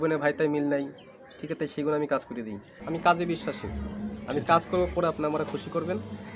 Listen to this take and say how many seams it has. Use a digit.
1